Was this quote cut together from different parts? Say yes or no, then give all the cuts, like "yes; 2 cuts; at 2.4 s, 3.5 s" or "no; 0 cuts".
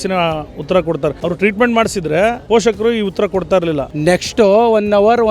yes; 3 cuts; at 1.2 s, 2.4 s, 3.9 s